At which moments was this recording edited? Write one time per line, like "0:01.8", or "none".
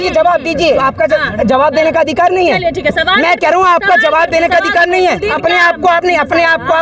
0:00.8
0:05.3